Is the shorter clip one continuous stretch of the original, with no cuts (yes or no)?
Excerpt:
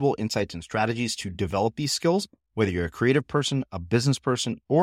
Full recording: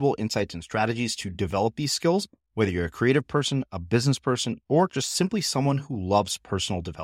yes